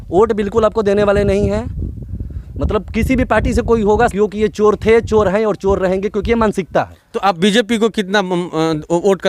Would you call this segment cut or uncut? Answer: uncut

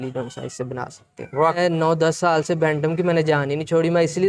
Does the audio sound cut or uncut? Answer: cut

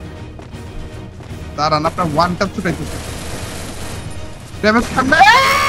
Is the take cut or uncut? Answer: uncut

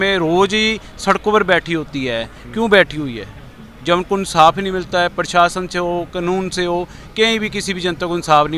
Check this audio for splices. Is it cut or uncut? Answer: uncut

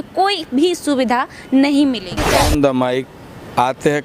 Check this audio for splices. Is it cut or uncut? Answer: cut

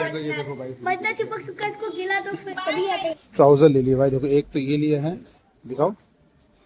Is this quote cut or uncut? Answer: cut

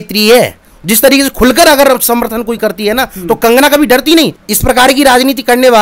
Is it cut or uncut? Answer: cut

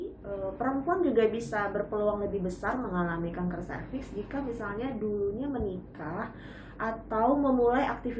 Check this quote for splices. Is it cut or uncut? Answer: uncut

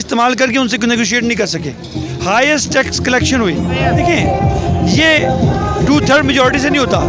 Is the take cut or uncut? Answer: cut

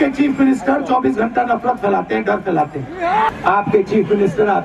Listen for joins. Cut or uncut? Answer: cut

